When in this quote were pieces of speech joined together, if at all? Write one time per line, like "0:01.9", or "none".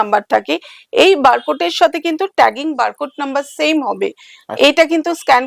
none